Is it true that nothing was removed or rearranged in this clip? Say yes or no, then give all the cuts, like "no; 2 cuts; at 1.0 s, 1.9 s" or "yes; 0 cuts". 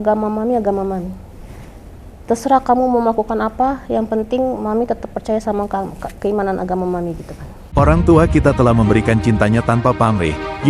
no; 1 cut; at 7.6 s